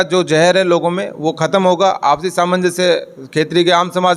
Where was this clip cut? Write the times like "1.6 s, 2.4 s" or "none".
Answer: none